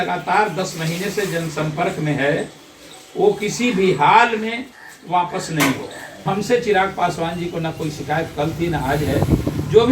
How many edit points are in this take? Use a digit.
1